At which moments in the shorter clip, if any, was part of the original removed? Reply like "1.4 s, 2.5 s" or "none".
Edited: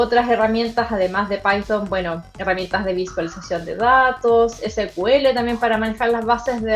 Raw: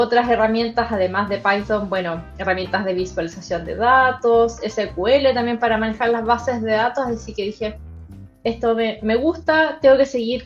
none